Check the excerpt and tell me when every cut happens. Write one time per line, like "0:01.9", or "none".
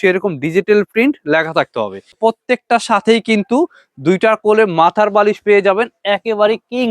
0:02.2